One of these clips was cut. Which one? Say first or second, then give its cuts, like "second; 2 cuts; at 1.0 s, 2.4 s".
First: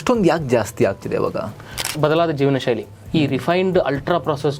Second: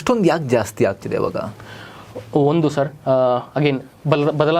first; 1 cut; at 2.0 s